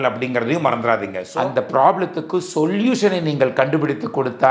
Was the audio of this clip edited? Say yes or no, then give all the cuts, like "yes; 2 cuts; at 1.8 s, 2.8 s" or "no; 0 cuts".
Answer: yes; 1 cut; at 1.2 s